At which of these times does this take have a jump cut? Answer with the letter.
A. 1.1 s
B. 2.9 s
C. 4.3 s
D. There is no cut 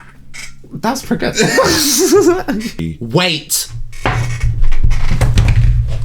B